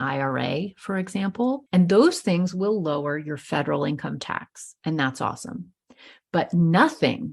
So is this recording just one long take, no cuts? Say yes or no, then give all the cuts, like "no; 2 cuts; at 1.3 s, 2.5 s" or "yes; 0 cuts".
no; 1 cut; at 1.6 s